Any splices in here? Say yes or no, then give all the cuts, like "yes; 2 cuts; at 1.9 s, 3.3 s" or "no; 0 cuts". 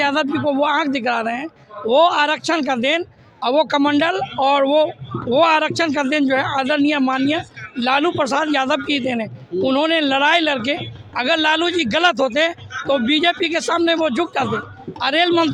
no; 0 cuts